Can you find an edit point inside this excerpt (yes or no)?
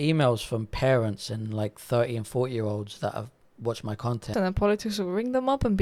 yes